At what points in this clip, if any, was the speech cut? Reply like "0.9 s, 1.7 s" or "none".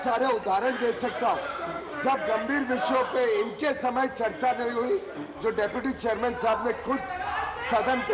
none